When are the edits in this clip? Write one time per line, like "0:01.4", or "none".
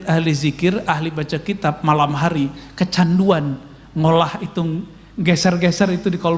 none